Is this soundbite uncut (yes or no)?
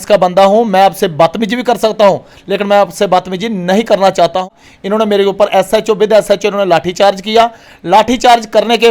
no